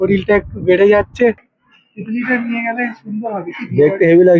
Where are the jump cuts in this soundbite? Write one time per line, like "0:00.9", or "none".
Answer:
0:01.4